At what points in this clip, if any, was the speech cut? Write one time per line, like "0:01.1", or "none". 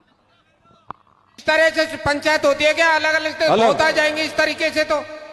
0:01.4